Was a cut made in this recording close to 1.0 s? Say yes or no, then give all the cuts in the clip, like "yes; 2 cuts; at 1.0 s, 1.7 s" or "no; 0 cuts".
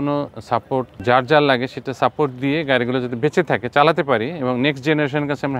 yes; 1 cut; at 1.0 s